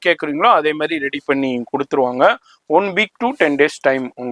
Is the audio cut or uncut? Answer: uncut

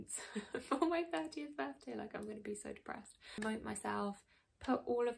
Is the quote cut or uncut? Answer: cut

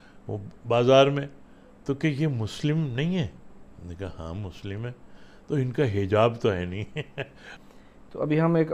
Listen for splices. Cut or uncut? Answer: cut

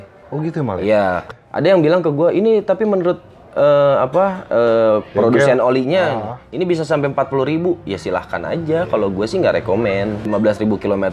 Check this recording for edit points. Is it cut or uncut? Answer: cut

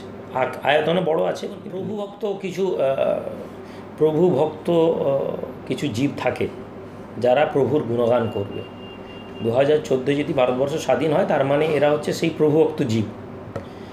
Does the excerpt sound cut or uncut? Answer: cut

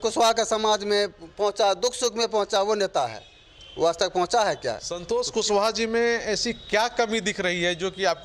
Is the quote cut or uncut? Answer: cut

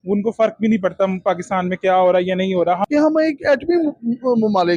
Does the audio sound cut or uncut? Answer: cut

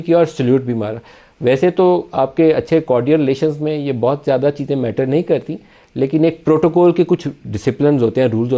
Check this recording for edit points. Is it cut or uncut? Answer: uncut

